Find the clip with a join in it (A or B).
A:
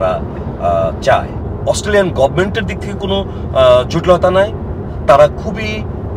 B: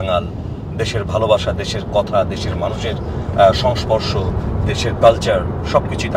A